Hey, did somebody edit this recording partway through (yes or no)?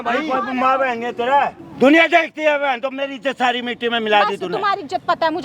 yes